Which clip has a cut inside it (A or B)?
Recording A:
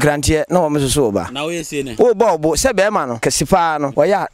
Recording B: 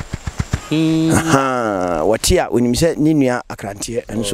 A